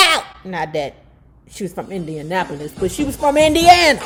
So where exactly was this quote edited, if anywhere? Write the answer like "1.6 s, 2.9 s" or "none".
none